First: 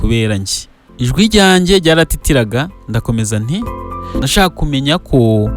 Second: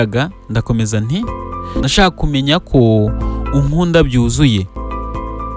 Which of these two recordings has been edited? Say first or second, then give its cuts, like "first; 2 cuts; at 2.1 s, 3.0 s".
first; 1 cut; at 0.9 s